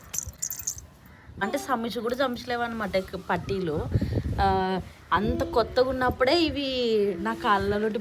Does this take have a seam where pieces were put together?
yes; 1 cut; at 1.4 s

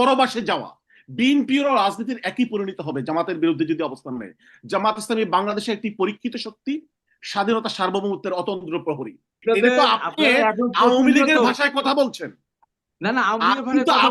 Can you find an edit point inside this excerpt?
yes; 1 cut; at 9.4 s

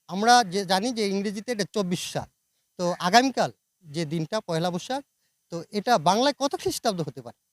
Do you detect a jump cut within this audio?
no; 0 cuts

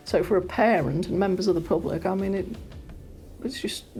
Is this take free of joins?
yes; 0 cuts

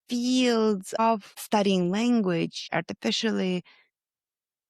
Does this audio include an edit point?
yes; 2 cuts; at 0.9 s, 2.6 s

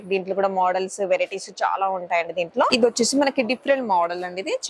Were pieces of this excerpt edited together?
yes; 1 cut; at 2.7 s

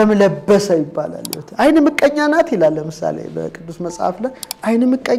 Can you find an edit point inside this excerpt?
no; 0 cuts

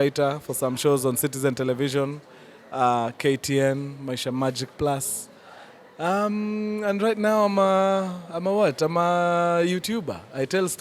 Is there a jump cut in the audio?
no; 0 cuts

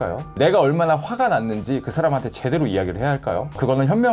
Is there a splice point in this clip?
no; 0 cuts

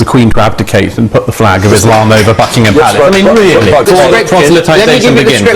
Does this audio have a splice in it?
yes; 1 cut; at 3.8 s

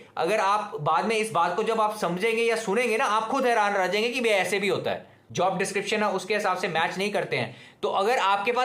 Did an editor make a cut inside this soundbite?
yes; 1 cut; at 5.2 s

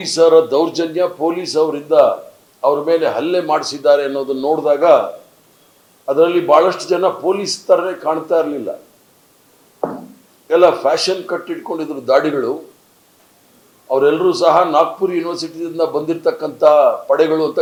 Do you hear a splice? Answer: no; 0 cuts

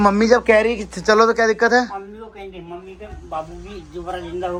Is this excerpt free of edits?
yes; 0 cuts

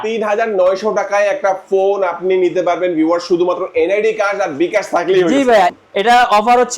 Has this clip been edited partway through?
yes; 1 cut; at 5.8 s

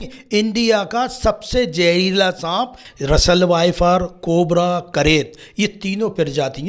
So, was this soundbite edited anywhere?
yes; 1 cut; at 2.8 s

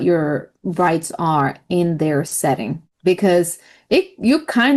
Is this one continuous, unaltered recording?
yes; 0 cuts

